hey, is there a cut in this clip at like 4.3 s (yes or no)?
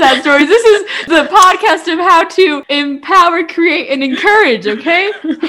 no